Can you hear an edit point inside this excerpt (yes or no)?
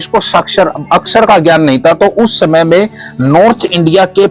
no